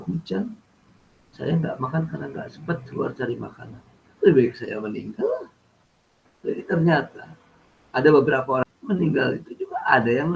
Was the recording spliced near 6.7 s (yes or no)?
no